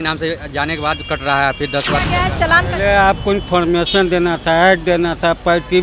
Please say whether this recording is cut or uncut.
cut